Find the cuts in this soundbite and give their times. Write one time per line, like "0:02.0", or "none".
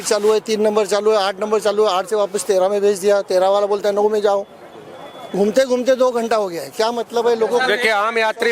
none

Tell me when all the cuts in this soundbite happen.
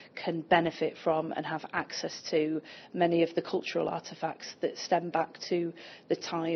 none

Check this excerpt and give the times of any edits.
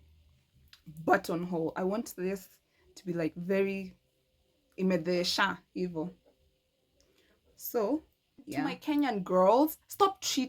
0:08.8

